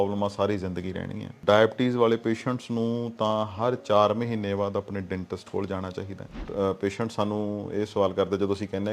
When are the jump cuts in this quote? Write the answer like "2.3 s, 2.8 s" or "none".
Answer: 1.4 s, 6.4 s